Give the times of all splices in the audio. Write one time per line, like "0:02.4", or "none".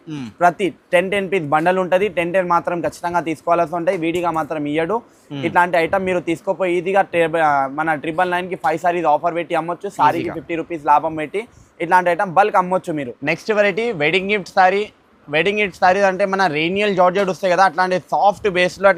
none